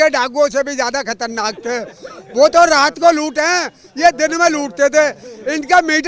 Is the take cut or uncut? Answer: uncut